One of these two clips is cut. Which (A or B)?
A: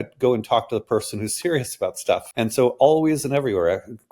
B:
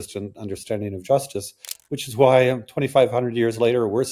A